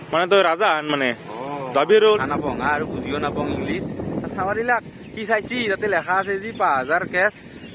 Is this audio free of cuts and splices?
no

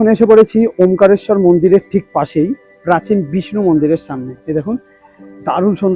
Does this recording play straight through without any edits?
yes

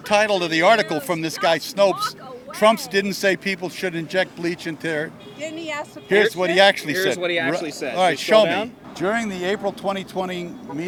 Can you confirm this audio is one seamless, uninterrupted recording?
yes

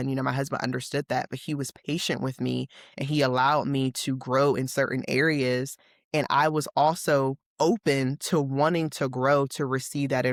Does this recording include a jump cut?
no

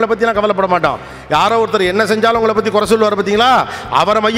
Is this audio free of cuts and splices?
yes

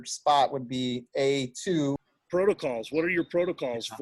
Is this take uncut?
no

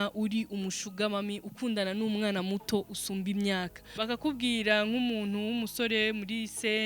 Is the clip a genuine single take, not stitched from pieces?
no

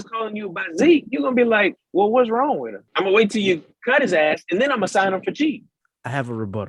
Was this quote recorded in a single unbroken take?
no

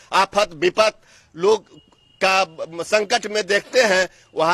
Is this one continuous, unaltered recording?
yes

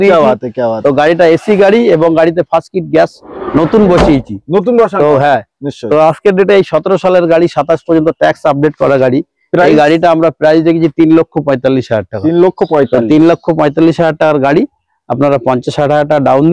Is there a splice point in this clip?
no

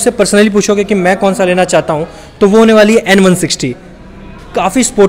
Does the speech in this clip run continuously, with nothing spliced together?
yes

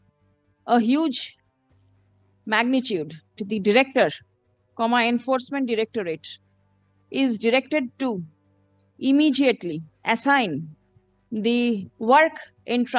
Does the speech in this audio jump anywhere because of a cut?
yes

